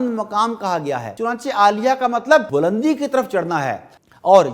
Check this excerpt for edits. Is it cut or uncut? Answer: cut